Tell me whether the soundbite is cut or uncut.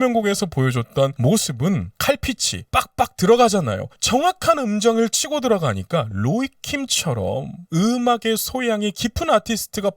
cut